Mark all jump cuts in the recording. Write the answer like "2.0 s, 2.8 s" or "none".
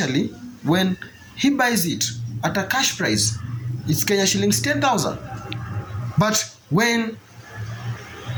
none